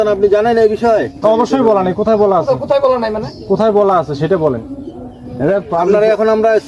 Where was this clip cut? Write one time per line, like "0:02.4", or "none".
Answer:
none